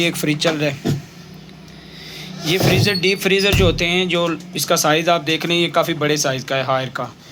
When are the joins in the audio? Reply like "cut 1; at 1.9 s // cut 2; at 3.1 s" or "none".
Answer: none